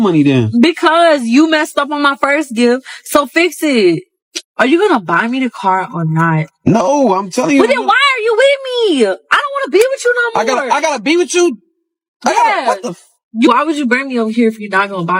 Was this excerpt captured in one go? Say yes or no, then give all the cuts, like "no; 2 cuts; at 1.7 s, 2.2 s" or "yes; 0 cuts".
yes; 0 cuts